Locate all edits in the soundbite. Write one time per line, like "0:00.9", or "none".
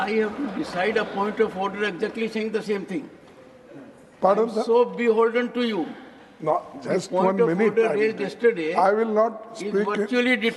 none